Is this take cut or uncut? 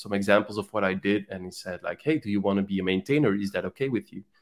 uncut